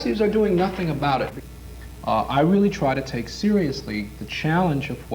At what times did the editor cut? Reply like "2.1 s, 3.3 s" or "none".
1.4 s